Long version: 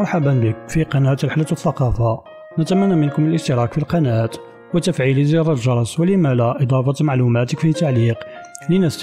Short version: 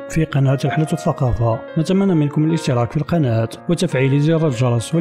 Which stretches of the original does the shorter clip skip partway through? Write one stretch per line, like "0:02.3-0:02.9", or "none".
0:02.2-0:02.5
0:04.4-0:04.6